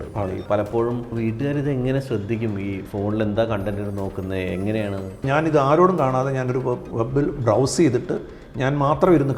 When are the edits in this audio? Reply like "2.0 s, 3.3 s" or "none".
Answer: 1.1 s, 5.2 s